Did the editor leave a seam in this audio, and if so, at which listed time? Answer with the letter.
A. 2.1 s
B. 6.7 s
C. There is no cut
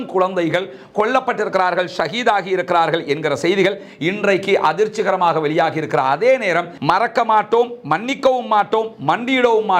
B